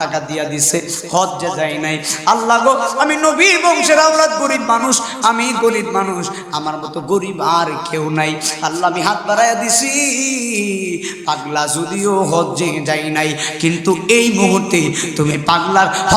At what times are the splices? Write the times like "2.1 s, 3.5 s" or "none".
none